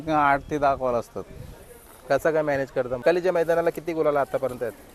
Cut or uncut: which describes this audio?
cut